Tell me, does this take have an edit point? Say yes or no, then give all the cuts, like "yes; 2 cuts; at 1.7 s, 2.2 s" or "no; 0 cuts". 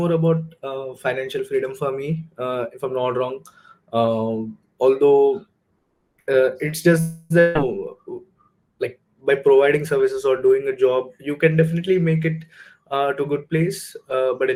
no; 0 cuts